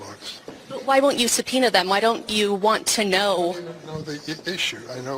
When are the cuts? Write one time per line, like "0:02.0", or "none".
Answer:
none